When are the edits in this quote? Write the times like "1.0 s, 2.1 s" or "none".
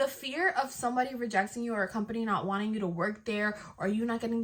none